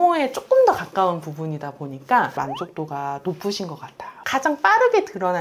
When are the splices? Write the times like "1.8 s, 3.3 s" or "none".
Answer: 2.4 s, 4.2 s